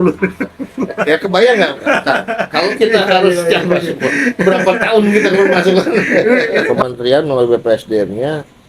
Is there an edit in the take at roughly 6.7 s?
yes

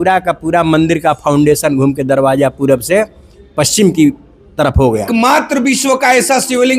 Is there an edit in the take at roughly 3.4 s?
no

